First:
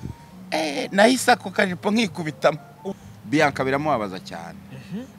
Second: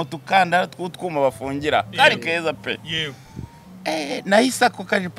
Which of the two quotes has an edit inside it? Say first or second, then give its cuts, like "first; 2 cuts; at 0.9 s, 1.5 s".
first; 1 cut; at 2.8 s